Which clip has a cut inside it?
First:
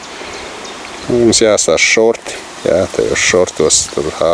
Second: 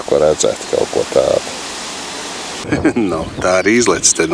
second; 1 cut; at 2.6 s

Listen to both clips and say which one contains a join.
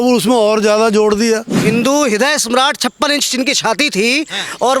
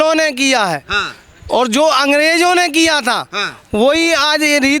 first; 1 cut; at 1.6 s

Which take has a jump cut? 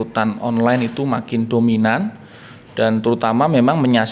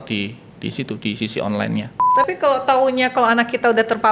second; 1 cut; at 2.0 s

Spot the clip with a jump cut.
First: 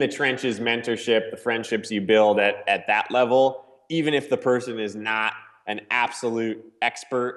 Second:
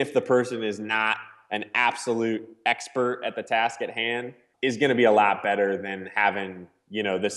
second; 1 cut; at 4.4 s

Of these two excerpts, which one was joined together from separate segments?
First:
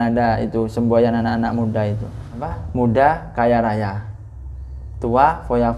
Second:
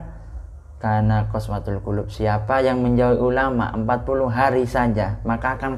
first; 1 cut; at 2.3 s

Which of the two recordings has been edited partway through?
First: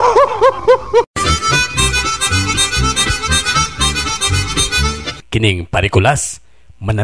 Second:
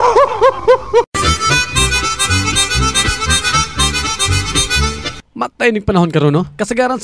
second; 2 cuts; at 1.1 s, 5.1 s

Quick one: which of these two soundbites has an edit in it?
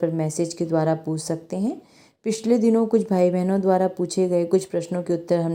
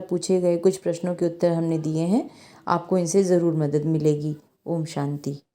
second; 1 cut; at 4.5 s

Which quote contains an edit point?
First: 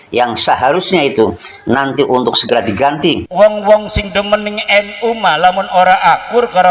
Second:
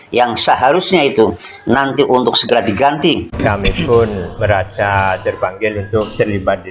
first; 1 cut; at 3.2 s

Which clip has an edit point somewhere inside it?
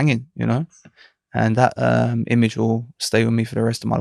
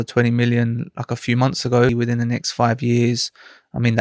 second; 1 cut; at 1.9 s

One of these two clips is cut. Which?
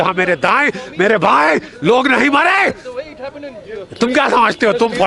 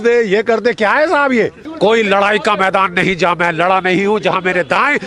second; 1 cut; at 1.6 s

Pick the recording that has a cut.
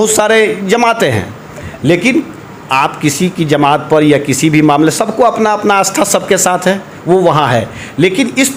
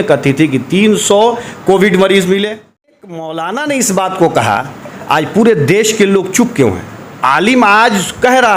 second; 1 cut; at 3.0 s

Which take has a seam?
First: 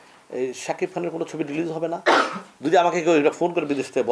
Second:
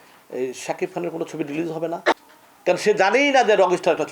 second; 1 cut; at 2.1 s

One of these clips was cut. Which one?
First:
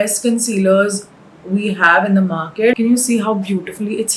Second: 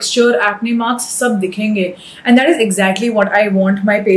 first; 1 cut; at 2.7 s

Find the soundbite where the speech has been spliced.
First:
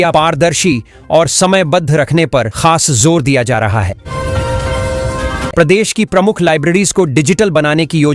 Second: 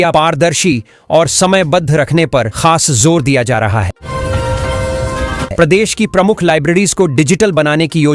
second; 2 cuts; at 4.0 s, 5.5 s

